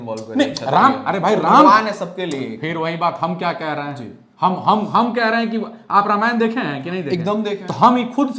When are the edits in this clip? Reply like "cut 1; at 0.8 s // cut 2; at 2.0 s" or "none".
none